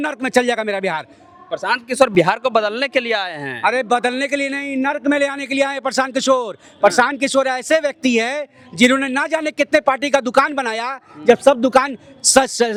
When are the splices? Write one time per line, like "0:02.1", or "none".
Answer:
none